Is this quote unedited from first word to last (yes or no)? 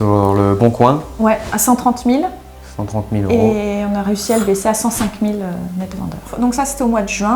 yes